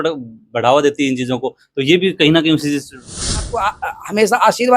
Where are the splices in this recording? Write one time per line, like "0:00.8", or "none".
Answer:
0:03.5